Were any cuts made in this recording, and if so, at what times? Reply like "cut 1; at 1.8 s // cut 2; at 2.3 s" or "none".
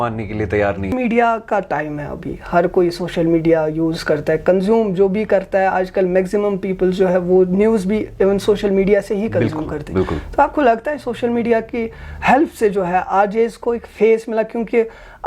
cut 1; at 0.9 s